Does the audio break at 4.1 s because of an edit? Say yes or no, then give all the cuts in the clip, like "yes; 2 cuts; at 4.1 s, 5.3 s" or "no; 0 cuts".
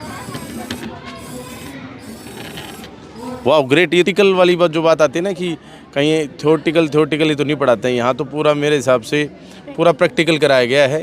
yes; 1 cut; at 4.1 s